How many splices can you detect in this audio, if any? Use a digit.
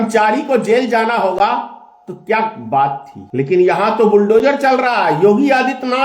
1